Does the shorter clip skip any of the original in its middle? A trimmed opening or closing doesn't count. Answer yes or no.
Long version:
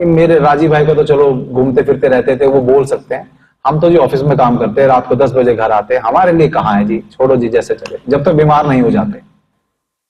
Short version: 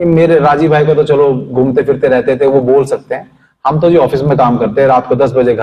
no